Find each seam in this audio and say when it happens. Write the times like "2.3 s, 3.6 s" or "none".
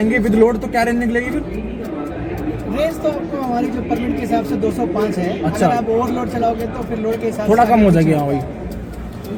none